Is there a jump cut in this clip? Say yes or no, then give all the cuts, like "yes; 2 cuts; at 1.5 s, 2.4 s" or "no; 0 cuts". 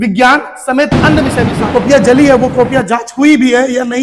yes; 1 cut; at 1.4 s